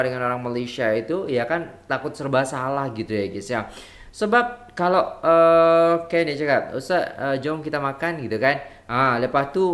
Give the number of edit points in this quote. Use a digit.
0